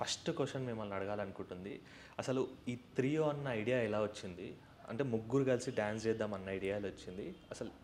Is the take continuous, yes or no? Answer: yes